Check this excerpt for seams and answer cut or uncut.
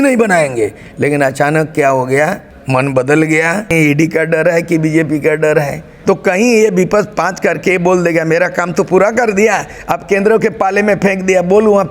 cut